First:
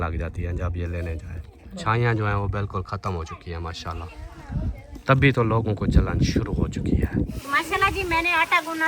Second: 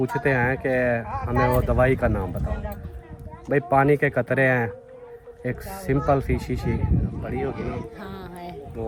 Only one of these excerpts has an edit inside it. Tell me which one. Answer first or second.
first